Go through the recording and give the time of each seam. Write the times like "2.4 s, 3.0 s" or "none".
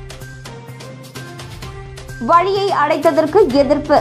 1.0 s